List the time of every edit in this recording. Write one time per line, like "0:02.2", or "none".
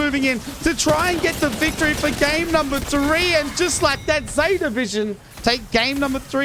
0:05.3